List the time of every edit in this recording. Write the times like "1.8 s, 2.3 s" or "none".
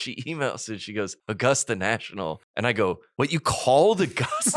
1.2 s, 2.4 s, 3.1 s